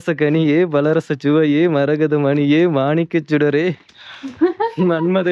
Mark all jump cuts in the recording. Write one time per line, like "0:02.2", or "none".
none